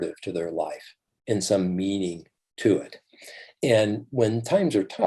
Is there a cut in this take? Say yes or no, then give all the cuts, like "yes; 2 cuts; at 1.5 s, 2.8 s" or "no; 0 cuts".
no; 0 cuts